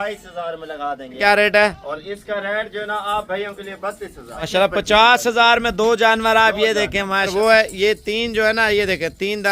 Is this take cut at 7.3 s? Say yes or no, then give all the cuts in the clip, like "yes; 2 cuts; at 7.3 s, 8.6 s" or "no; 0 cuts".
yes; 3 cuts; at 1.2 s, 4.5 s, 7.3 s